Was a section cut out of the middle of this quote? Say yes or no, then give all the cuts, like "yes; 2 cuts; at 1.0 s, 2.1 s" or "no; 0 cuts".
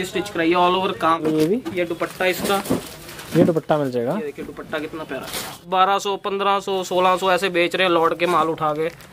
yes; 2 cuts; at 1.2 s, 5.6 s